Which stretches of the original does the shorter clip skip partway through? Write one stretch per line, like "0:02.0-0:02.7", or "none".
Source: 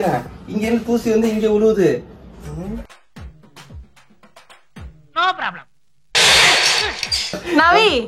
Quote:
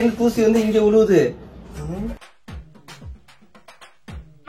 none